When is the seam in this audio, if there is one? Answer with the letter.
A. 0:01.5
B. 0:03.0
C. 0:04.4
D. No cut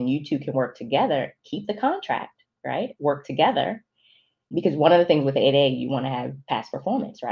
C